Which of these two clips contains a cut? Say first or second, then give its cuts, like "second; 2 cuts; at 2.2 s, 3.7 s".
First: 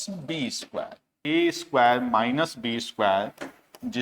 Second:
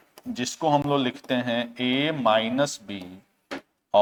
first; 1 cut; at 1.2 s